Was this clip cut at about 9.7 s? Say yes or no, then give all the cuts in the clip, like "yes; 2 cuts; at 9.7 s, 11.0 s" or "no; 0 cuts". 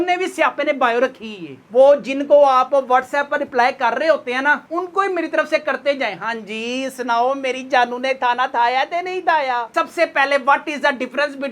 yes; 2 cuts; at 1.5 s, 9.7 s